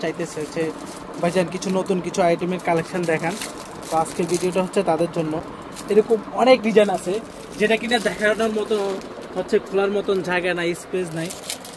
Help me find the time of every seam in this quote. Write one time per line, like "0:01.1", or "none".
none